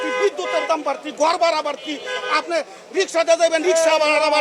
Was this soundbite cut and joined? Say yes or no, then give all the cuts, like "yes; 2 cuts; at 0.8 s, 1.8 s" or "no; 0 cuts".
no; 0 cuts